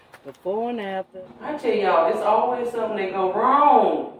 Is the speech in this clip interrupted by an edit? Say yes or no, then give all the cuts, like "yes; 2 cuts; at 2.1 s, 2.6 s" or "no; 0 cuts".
yes; 1 cut; at 1.1 s